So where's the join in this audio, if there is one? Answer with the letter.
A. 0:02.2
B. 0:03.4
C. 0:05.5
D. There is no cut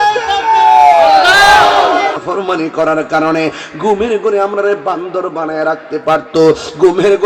A